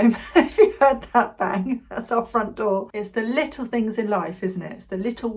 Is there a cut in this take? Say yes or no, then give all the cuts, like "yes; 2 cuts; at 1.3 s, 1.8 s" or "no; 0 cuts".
yes; 1 cut; at 2.9 s